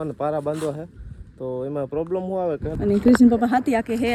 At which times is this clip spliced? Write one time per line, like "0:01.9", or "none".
0:02.7